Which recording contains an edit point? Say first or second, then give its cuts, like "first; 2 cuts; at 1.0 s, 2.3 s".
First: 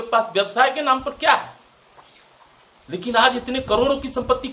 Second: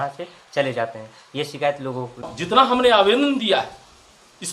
second; 1 cut; at 2.3 s